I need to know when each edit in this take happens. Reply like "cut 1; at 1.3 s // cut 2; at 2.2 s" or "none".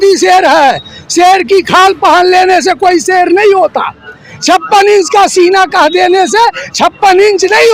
none